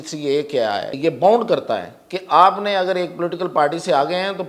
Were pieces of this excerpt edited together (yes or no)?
yes